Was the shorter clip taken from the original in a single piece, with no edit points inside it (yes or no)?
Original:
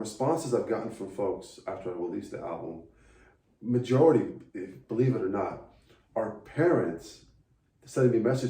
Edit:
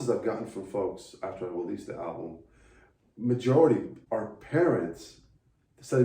no